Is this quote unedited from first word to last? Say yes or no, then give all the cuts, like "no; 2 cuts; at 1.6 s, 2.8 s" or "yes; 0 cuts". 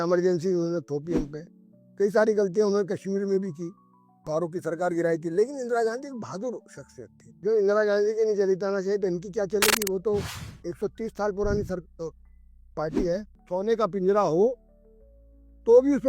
no; 2 cuts; at 7.4 s, 13.3 s